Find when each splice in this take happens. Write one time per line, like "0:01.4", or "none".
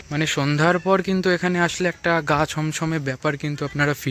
none